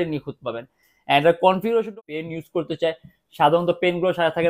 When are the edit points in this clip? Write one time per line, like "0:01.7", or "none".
0:01.9